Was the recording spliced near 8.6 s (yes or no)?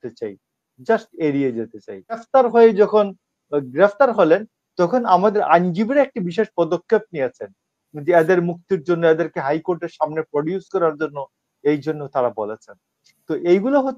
no